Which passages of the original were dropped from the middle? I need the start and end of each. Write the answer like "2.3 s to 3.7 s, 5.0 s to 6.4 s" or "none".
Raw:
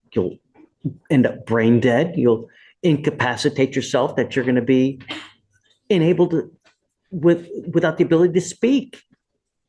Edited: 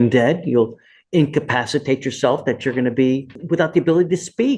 5.0 s to 7.6 s